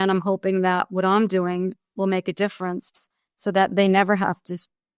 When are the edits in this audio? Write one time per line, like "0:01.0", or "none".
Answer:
none